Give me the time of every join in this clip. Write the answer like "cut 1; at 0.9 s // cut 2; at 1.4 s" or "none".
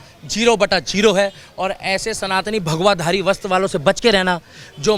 none